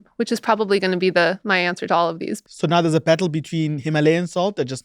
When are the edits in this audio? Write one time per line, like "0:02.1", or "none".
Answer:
0:02.3